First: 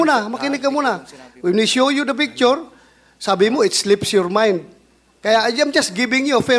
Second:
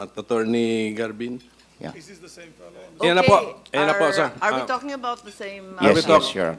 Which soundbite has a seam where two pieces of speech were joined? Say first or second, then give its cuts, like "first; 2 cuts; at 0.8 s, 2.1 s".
second; 1 cut; at 1.6 s